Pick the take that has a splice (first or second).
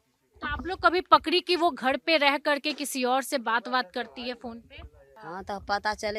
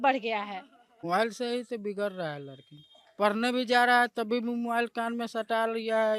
second